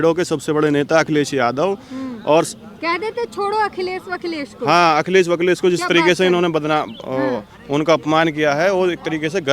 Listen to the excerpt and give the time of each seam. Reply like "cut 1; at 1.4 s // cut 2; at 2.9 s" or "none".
none